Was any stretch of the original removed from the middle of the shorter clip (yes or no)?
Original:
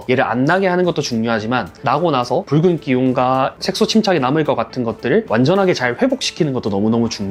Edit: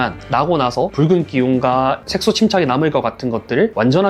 no